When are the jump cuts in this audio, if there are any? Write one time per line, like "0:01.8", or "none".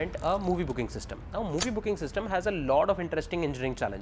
none